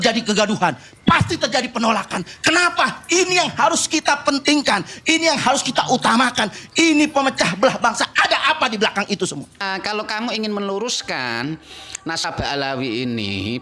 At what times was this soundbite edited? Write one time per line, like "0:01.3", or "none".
0:09.6